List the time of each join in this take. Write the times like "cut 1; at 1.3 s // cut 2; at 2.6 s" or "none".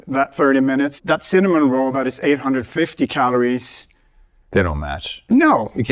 cut 1; at 0.9 s